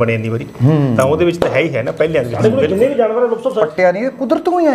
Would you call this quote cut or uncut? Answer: cut